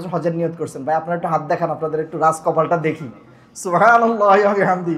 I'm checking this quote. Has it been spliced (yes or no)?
no